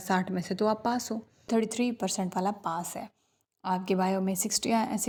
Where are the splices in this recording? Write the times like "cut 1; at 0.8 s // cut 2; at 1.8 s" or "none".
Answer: none